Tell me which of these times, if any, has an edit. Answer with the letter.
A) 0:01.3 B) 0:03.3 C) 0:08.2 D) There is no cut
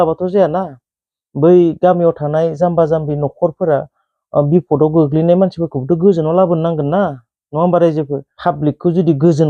C